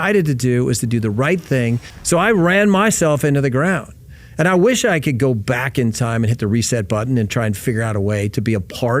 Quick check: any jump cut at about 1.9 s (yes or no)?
yes